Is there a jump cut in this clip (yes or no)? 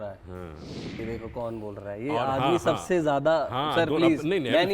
yes